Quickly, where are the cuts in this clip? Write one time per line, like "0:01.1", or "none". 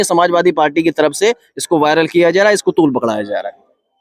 none